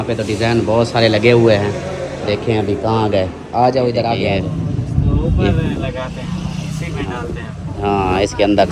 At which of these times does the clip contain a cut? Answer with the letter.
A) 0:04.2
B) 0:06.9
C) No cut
A